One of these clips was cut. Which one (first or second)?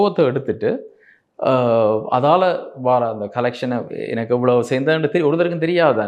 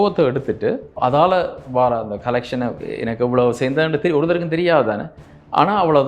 second